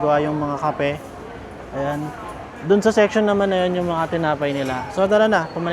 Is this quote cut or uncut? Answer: uncut